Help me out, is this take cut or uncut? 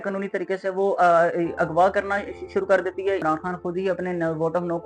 cut